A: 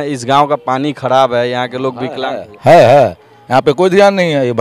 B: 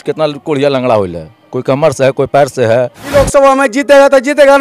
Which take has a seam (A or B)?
B